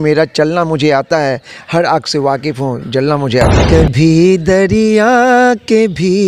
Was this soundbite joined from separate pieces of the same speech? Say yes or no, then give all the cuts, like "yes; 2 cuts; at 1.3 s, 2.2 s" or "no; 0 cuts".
yes; 1 cut; at 3.6 s